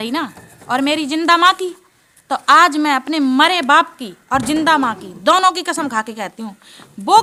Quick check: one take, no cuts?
yes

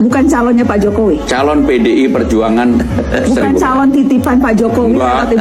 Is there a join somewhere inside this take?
no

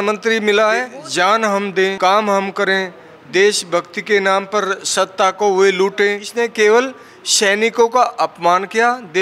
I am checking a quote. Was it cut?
yes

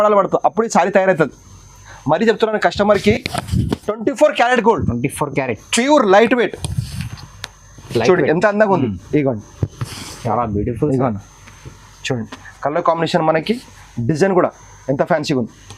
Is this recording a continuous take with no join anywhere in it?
no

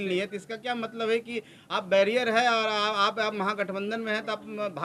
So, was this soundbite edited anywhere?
no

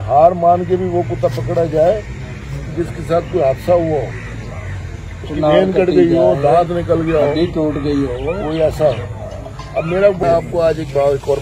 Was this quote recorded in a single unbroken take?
no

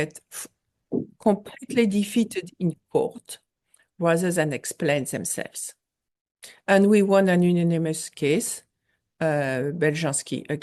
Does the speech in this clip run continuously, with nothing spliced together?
yes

